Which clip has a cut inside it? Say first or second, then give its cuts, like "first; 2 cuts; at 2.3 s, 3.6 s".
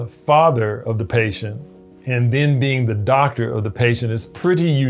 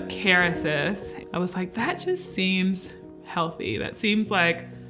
second; 1 cut; at 1.1 s